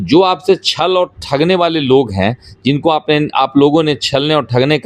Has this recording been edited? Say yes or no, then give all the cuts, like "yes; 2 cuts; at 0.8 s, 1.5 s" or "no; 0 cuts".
no; 0 cuts